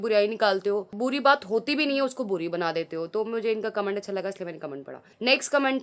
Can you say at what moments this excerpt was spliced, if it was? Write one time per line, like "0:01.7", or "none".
none